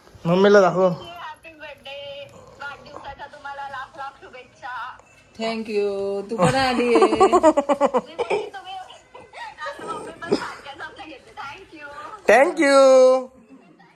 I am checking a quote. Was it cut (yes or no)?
no